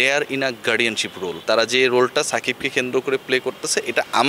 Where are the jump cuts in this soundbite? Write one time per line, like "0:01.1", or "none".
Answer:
0:01.4

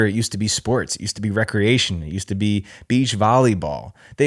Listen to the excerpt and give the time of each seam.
none

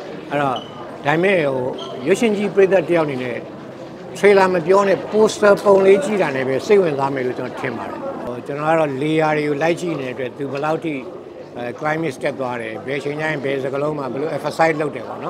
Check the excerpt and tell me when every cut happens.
0:08.2

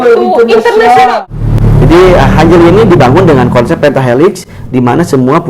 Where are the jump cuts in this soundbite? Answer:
0:01.2

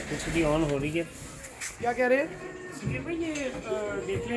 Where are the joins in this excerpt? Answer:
0:01.8

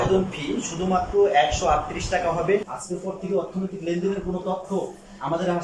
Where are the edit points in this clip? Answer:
0:02.7

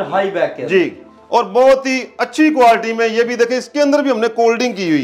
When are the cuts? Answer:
none

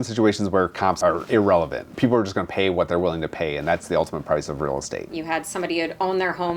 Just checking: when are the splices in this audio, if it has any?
0:01.0
0:01.9
0:05.1

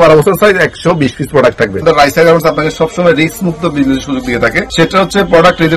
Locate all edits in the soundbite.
0:01.8
0:04.7

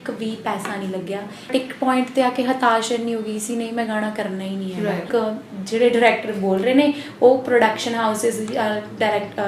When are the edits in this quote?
0:01.5
0:05.1

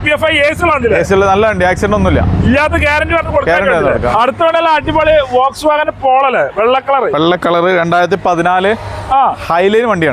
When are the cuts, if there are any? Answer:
none

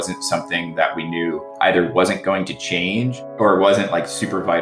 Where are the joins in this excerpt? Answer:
0:01.5
0:03.2

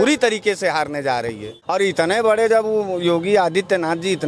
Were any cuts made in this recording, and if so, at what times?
0:01.6

